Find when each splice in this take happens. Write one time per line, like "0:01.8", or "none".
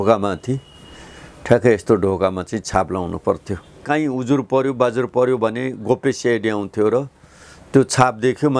0:03.8